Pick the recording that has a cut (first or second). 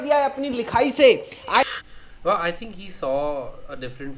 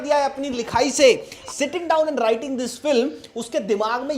second